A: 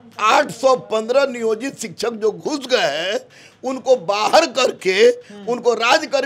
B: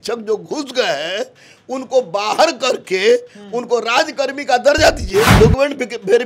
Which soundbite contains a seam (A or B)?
B